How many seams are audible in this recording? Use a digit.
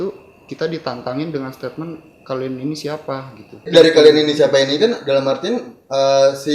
1